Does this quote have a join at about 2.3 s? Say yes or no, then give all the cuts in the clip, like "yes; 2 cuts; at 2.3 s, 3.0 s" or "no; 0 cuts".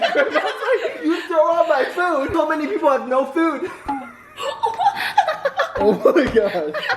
yes; 1 cut; at 2.3 s